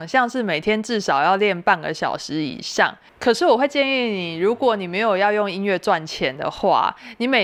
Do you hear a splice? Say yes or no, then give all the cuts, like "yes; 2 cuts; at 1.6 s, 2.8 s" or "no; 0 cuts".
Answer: no; 0 cuts